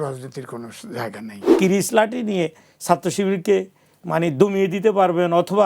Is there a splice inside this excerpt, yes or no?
yes